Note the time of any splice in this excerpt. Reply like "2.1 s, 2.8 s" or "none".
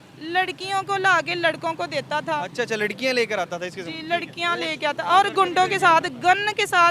none

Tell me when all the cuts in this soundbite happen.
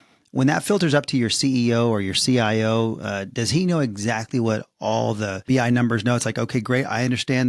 5.5 s

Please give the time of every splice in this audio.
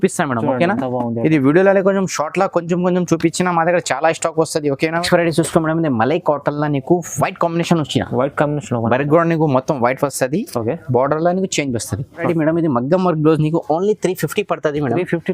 5.0 s, 12.2 s

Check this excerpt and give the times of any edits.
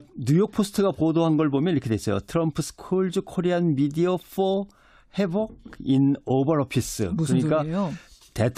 none

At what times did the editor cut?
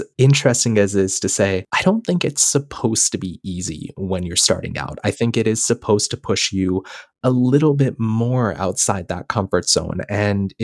1.7 s

